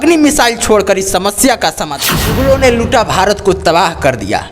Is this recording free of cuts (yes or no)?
no